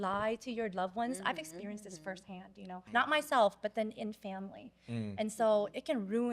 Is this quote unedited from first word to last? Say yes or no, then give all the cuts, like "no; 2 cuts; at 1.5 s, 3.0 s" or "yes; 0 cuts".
no; 1 cut; at 2.8 s